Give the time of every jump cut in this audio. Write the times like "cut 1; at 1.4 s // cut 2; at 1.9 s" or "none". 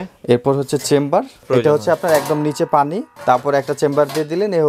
cut 1; at 1.4 s // cut 2; at 3.1 s